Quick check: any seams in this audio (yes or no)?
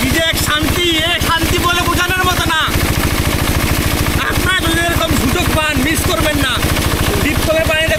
no